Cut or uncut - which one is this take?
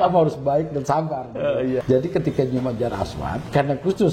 cut